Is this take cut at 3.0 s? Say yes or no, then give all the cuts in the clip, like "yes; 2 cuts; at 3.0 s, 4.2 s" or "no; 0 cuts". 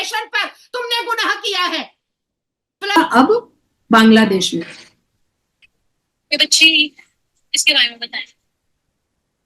yes; 1 cut; at 3.0 s